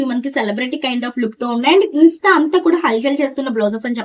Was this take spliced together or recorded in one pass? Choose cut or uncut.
uncut